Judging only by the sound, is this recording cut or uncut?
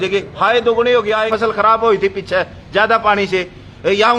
cut